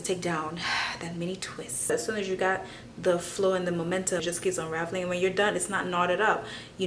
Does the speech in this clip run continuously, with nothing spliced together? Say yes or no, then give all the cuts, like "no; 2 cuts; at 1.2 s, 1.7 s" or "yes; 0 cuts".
no; 2 cuts; at 1.9 s, 4.2 s